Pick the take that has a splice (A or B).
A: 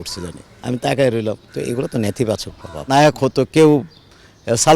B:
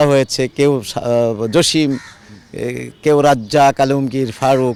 A